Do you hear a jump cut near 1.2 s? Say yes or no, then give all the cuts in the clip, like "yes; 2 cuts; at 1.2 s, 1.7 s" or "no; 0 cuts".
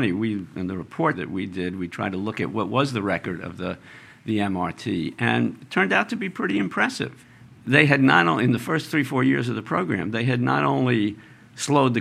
yes; 2 cuts; at 1.2 s, 7.2 s